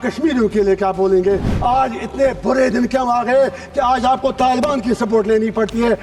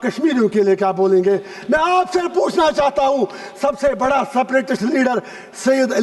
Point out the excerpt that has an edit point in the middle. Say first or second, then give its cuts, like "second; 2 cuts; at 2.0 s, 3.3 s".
first; 1 cut; at 1.5 s